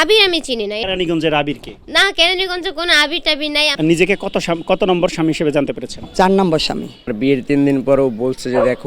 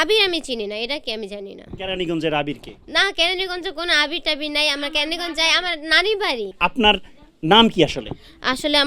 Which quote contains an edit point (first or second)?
first